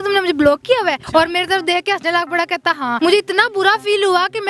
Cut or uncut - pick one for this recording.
cut